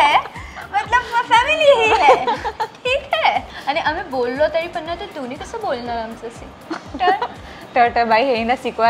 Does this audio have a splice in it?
yes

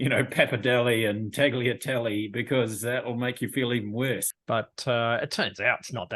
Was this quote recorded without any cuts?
no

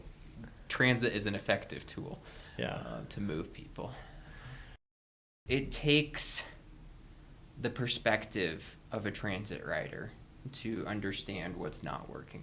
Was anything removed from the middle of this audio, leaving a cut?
yes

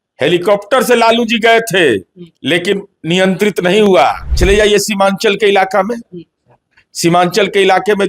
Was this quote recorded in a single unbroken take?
no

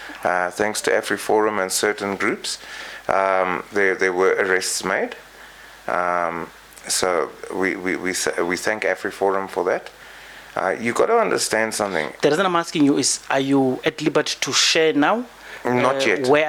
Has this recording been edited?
no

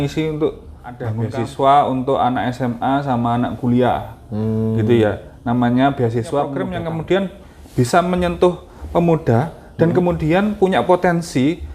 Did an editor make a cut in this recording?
yes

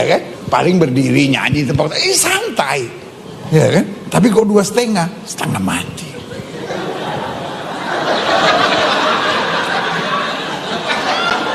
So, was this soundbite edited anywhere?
no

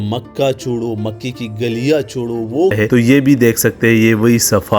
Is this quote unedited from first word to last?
no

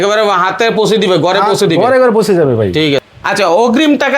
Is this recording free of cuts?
no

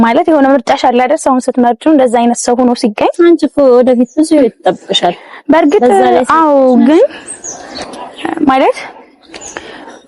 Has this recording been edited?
no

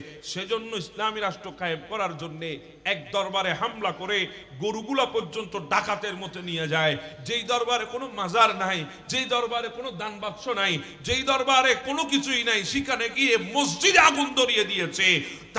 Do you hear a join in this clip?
no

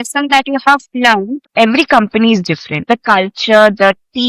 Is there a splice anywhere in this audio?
yes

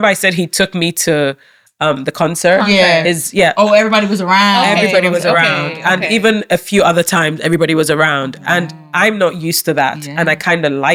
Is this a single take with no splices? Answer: yes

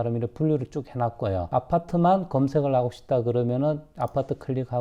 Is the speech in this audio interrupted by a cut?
no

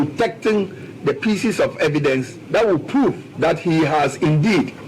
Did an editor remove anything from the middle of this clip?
yes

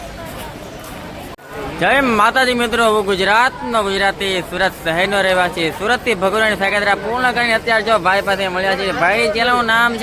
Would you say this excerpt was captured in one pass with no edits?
no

